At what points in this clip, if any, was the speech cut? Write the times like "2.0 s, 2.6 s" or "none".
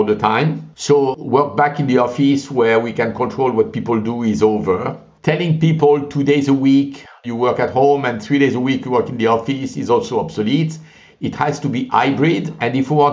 1.1 s

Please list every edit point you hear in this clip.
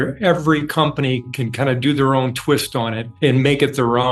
none

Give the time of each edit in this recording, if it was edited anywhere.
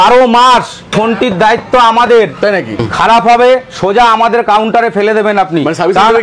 0.9 s, 2.8 s

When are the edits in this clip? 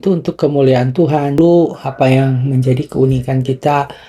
1.4 s

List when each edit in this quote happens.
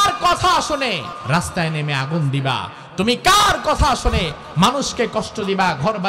1.1 s

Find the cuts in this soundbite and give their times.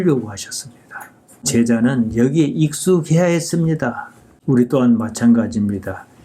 1.3 s

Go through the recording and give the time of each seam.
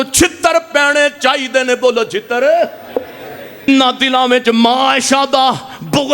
3.7 s

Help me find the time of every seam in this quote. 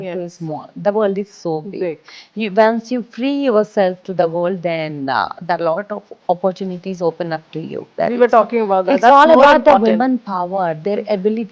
7.9 s

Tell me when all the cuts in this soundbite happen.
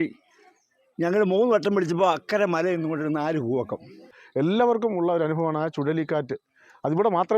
4.2 s

